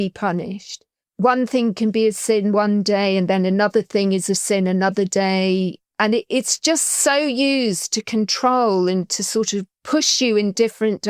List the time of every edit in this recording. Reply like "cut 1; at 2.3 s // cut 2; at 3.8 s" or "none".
cut 1; at 1.0 s